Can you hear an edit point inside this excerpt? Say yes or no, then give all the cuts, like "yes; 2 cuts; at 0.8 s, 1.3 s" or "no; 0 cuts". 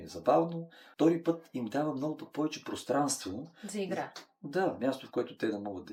no; 0 cuts